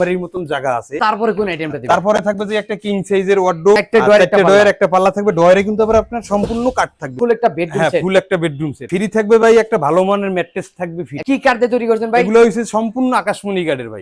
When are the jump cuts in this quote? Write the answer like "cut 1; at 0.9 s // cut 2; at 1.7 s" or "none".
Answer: cut 1; at 0.9 s // cut 2; at 3.8 s // cut 3; at 7.1 s // cut 4; at 8.8 s // cut 5; at 11.1 s